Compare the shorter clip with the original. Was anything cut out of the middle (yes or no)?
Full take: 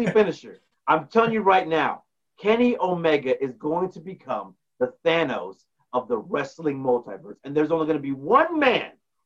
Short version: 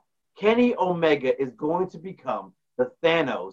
no